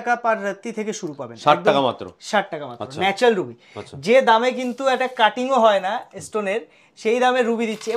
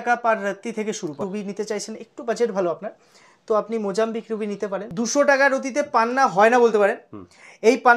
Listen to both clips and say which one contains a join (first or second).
second